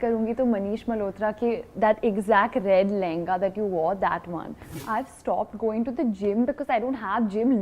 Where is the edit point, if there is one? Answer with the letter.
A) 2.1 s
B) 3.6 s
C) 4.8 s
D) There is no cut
C